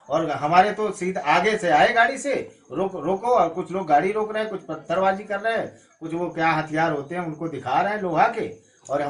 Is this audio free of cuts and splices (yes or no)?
yes